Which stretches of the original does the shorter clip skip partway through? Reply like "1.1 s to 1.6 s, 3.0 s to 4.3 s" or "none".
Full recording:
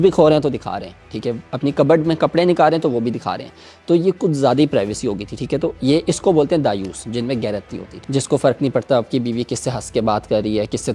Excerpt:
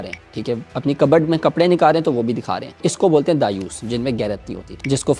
3.6 s to 6.1 s